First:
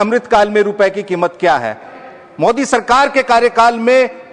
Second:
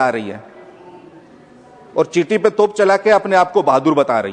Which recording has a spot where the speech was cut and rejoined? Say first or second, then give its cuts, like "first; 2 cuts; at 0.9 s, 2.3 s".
first; 1 cut; at 1.9 s